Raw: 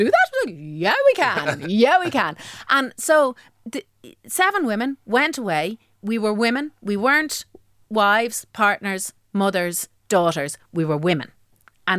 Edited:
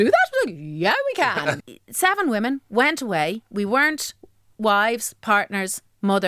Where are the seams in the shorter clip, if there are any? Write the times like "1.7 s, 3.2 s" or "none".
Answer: 1.6 s, 3.5 s